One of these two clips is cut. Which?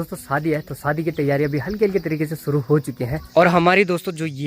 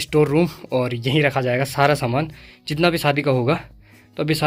first; 1 cut; at 3.1 s

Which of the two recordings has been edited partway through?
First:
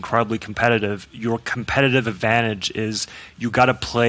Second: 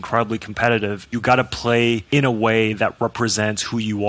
second; 2 cuts; at 1.0 s, 2.0 s

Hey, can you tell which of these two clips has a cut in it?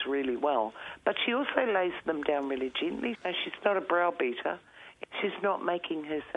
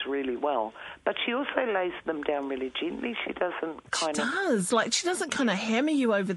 first; 2 cuts; at 3.2 s, 4.9 s

